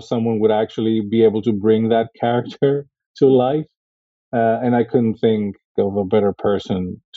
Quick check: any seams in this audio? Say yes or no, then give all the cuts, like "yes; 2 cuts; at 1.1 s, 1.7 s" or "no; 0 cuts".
yes; 1 cut; at 5.7 s